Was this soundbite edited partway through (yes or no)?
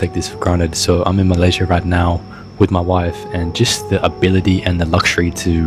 no